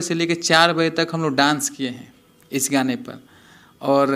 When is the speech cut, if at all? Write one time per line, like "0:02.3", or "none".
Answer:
none